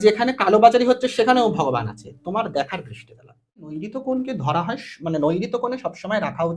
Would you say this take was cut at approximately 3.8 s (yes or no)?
yes